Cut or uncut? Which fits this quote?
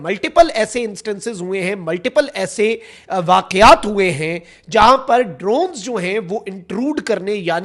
uncut